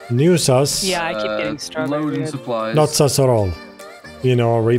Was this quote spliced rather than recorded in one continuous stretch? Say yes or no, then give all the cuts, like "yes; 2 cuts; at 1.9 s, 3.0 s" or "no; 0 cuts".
no; 0 cuts